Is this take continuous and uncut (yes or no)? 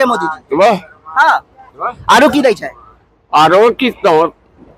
yes